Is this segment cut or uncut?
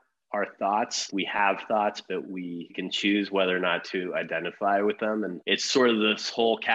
cut